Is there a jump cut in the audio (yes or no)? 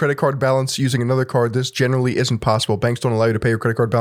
no